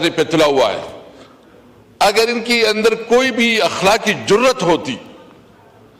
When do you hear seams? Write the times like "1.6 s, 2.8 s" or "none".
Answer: none